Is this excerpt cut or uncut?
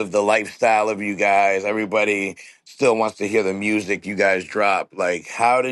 uncut